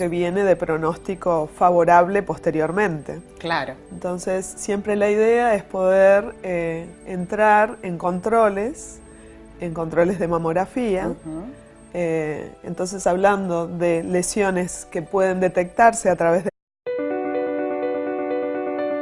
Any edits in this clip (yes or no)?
no